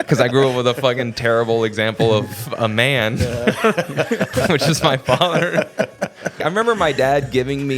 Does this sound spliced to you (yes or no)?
yes